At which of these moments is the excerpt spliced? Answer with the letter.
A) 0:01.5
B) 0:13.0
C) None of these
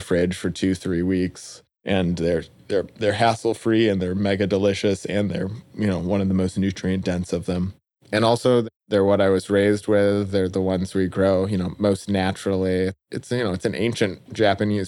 B